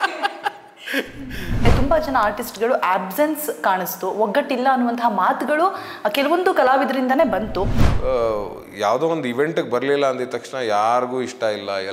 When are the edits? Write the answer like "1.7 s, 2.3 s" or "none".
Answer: 1.7 s, 7.8 s